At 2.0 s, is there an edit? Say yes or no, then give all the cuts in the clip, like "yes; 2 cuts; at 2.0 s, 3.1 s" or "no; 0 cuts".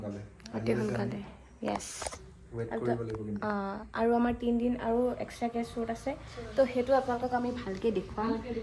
no; 0 cuts